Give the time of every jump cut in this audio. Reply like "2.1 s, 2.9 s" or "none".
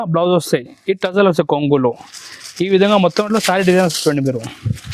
none